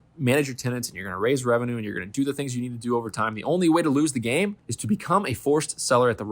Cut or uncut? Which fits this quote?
cut